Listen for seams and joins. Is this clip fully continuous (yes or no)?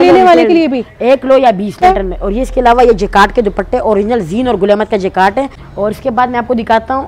no